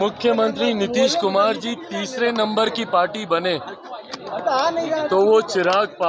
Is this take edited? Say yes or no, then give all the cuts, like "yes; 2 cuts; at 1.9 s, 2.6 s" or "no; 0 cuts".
no; 0 cuts